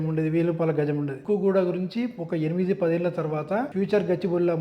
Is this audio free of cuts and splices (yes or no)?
no